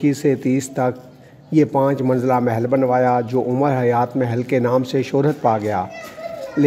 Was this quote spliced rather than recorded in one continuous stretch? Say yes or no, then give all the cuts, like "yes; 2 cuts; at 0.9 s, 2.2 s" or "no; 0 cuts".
no; 0 cuts